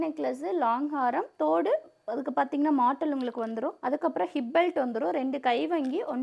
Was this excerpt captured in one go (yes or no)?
no